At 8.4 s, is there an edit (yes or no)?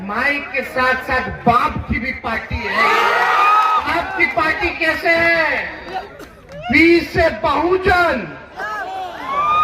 no